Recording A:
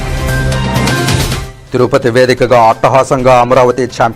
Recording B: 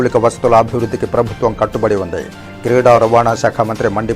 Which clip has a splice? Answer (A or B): A